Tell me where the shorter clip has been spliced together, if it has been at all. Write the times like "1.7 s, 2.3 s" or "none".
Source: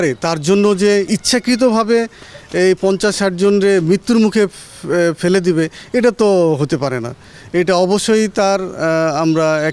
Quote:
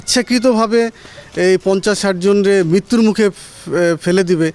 none

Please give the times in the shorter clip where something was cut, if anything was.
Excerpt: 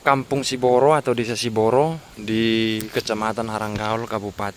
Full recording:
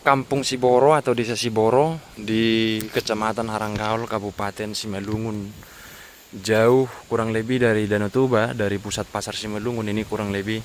none

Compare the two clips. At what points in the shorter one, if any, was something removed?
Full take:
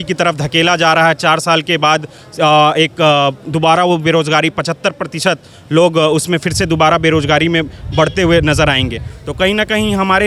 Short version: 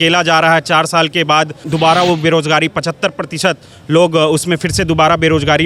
1.6 s

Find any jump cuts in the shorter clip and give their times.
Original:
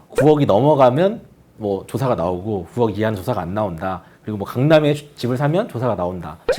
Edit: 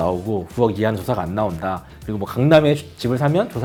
none

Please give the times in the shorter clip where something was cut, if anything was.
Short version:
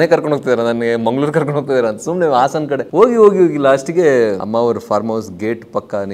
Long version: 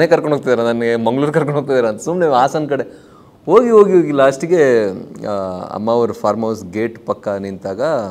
2.9 s, 4.4 s

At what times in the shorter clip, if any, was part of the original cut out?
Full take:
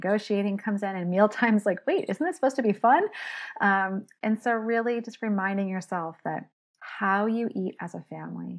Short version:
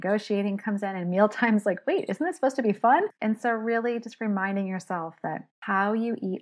3.1 s, 5.5 s

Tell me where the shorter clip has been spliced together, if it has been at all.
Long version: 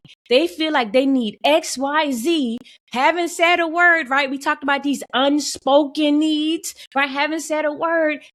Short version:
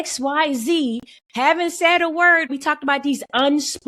2.5 s

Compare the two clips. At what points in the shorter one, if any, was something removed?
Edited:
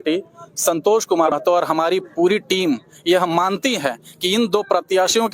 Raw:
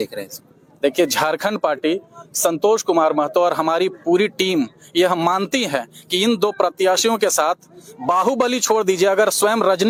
1.3 s

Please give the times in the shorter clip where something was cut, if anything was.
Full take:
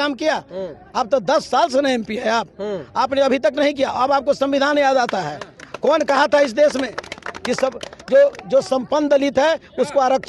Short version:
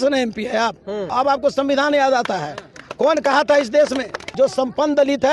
1.1 s, 4.3 s

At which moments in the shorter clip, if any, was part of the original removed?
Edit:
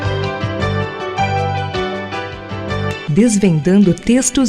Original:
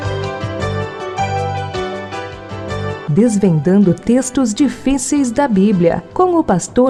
none

